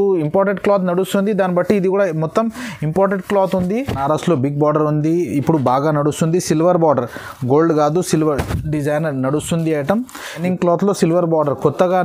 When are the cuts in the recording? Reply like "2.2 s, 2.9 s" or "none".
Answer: 4.0 s, 10.4 s